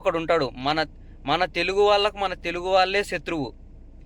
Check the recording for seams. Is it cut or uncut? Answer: uncut